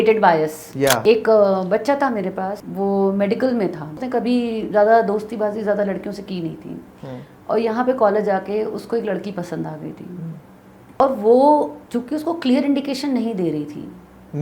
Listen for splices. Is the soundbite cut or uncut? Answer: cut